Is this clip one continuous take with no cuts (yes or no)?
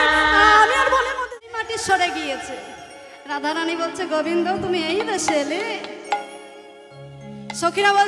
no